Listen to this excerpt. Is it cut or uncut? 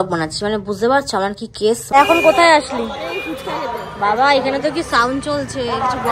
cut